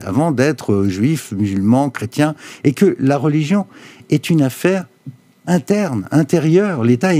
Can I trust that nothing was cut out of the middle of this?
yes; 0 cuts

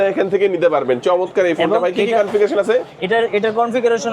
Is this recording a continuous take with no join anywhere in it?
yes; 0 cuts

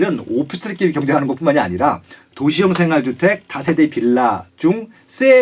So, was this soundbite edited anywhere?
no; 0 cuts

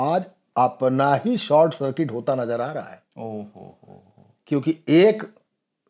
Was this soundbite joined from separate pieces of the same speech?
no; 0 cuts

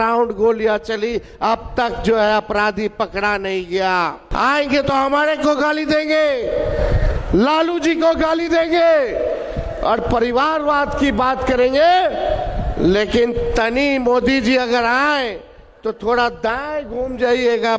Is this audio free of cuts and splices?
no; 1 cut; at 4.2 s

